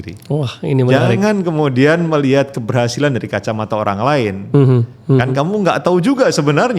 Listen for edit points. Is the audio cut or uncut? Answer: uncut